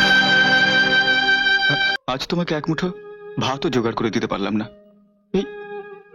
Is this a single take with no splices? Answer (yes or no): no